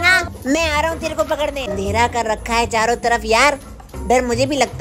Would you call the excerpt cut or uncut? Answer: cut